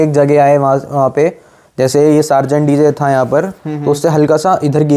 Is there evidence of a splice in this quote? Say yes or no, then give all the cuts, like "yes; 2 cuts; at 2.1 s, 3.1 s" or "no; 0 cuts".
no; 0 cuts